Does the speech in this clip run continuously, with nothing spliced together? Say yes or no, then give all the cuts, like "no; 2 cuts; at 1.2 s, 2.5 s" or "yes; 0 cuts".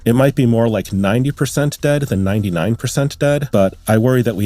no; 1 cut; at 3.5 s